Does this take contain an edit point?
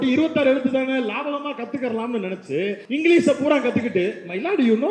yes; 1 cut; at 2.8 s

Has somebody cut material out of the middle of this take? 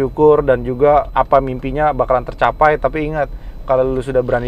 yes; 1 cut; at 1.1 s

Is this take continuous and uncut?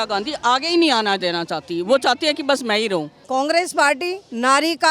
no; 1 cut; at 3.2 s

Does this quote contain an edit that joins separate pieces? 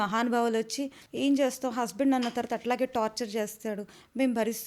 yes; 1 cut; at 1.0 s

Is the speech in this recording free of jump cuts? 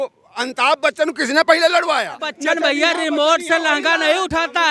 no; 1 cut; at 2.1 s

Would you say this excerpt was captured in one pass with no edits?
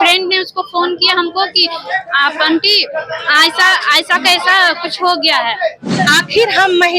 no; 1 cut; at 5.8 s

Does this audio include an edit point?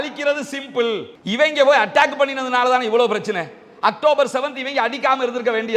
yes; 1 cut; at 1.1 s

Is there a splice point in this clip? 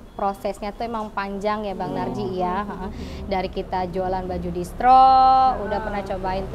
no; 0 cuts

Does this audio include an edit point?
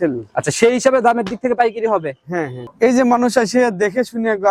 yes; 1 cut; at 2.6 s

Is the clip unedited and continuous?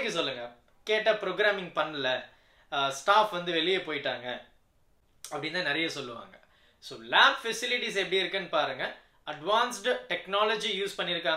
yes; 0 cuts

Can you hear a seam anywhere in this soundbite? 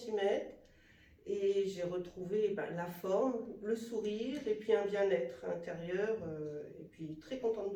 no; 0 cuts

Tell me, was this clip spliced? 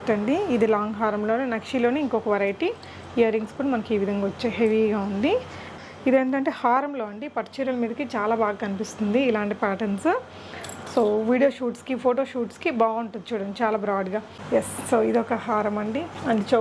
yes; 2 cuts; at 5.8 s, 14.4 s

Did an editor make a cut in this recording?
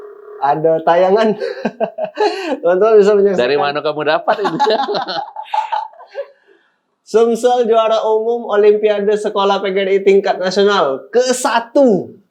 no; 0 cuts

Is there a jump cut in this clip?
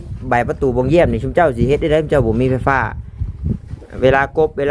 no; 0 cuts

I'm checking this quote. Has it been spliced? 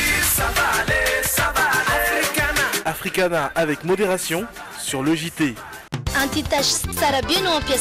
yes; 1 cut; at 5.8 s

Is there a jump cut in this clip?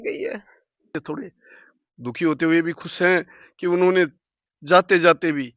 yes; 1 cut; at 1.0 s

